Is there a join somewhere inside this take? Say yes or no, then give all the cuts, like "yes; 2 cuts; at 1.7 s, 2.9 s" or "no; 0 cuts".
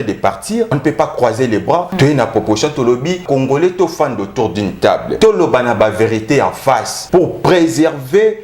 yes; 5 cuts; at 0.8 s, 1.9 s, 3.2 s, 5.1 s, 6.9 s